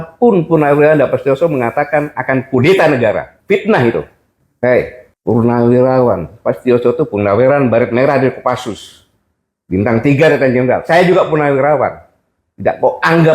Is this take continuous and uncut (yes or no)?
no